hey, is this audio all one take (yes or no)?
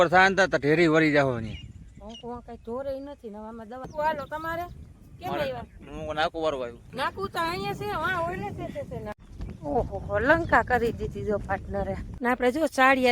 no